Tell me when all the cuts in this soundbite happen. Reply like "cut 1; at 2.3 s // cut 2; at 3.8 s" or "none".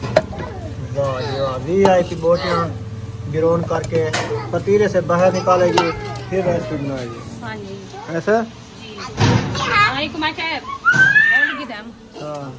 none